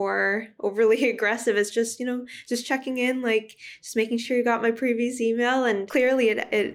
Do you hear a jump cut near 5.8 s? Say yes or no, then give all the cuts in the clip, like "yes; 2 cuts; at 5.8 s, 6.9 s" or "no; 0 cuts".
yes; 1 cut; at 5.8 s